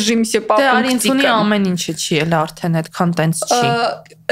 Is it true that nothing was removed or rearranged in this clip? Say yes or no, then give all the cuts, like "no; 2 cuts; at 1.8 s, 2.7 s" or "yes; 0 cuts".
yes; 0 cuts